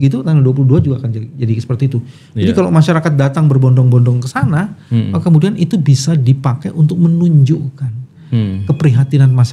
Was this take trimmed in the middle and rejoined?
no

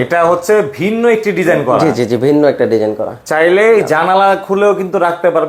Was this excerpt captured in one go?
yes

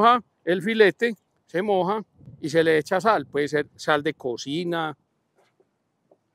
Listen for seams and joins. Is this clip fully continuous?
no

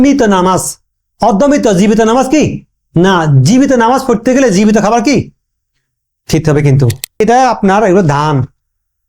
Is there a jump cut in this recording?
yes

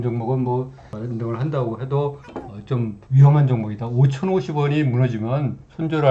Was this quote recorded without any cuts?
no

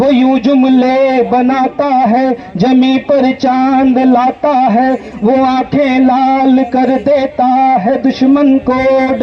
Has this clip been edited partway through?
no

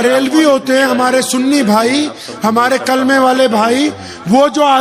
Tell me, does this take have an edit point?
no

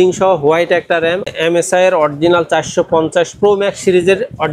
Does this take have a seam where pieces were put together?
yes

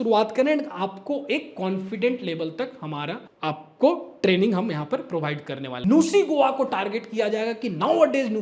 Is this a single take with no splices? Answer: no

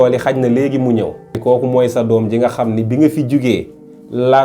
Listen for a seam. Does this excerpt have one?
yes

